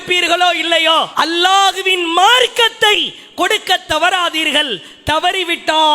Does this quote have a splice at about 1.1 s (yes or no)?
yes